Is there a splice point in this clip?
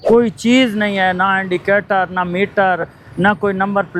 no; 0 cuts

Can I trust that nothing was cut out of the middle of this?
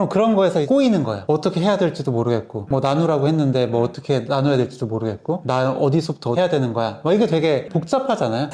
yes; 0 cuts

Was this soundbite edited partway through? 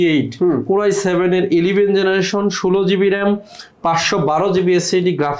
no; 0 cuts

